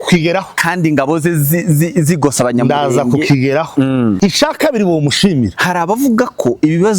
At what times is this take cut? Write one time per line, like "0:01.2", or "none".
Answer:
0:04.2
0:05.5